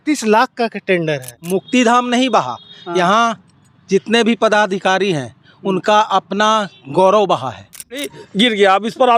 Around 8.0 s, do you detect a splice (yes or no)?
yes